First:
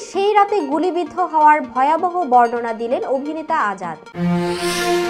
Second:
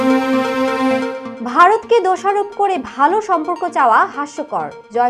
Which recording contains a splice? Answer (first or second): second